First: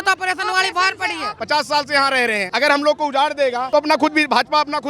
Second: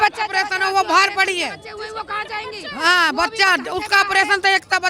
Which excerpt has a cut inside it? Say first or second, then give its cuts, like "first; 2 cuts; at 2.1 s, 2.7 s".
first; 3 cuts; at 1.3 s, 2.5 s, 3.6 s